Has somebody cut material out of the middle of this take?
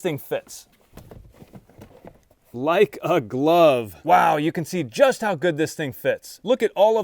yes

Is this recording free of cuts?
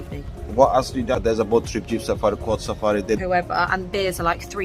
no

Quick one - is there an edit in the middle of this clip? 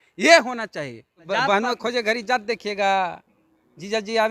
yes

